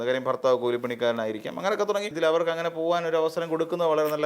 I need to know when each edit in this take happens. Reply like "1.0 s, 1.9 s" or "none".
2.1 s